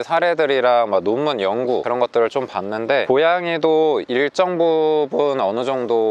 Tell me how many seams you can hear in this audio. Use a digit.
0